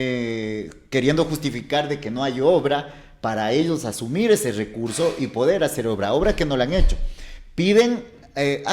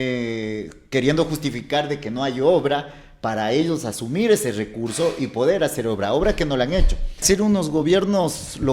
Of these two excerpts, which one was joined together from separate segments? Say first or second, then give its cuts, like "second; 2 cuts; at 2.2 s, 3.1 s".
second; 1 cut; at 7.2 s